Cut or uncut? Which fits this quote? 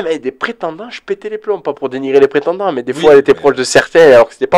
uncut